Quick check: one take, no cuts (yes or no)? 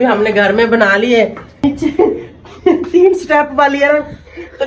no